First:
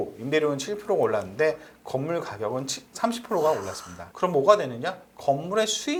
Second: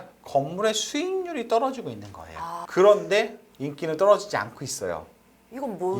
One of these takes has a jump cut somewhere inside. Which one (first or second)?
second